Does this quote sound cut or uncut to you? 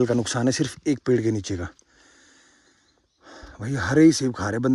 uncut